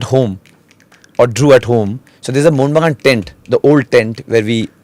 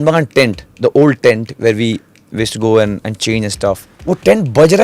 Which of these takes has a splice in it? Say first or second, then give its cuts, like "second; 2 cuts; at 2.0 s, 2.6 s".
second; 1 cut; at 3.9 s